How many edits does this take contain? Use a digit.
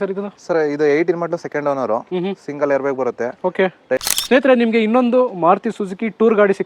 1